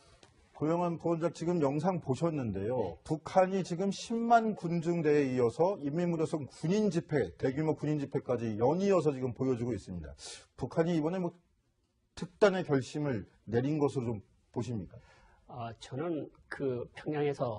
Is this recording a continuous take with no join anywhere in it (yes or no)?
no